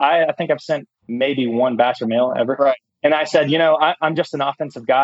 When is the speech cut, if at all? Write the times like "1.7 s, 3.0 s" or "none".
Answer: 1.0 s, 2.9 s